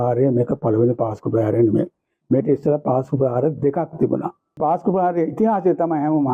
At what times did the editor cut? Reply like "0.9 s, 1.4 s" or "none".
4.6 s